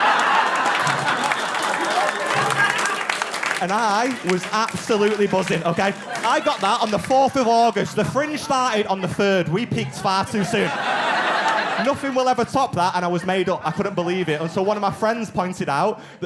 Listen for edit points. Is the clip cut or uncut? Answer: cut